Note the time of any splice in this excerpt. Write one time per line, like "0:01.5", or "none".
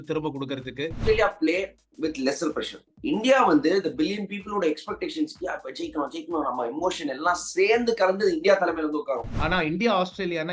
0:01.0
0:09.3